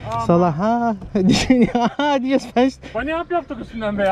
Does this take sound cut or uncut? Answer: uncut